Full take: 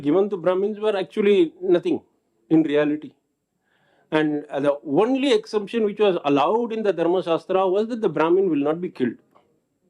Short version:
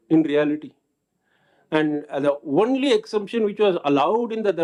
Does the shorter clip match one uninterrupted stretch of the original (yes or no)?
yes